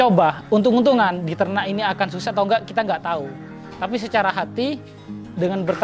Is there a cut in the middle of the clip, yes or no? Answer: no